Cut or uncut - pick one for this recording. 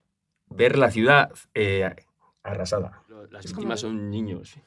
cut